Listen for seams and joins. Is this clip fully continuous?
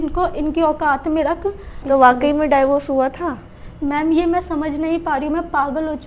no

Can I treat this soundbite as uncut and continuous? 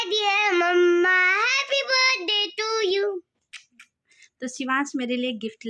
yes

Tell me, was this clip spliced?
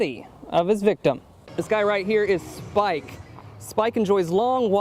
yes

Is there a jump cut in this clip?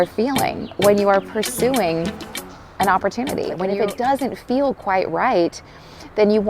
yes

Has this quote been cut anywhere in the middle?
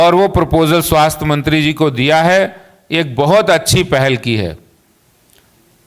no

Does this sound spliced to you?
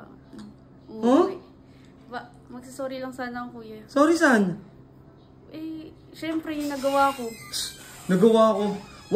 no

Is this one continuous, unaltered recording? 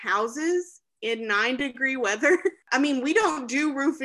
no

